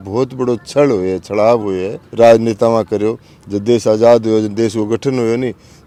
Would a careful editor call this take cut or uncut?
uncut